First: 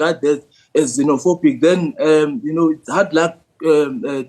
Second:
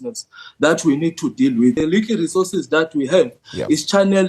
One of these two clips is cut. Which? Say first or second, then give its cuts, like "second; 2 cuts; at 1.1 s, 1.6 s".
second; 1 cut; at 1.8 s